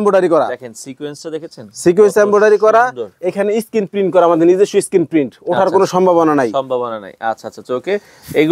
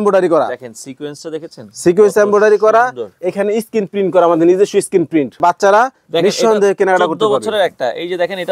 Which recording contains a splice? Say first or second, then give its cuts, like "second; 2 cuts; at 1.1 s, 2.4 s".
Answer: second; 1 cut; at 5.4 s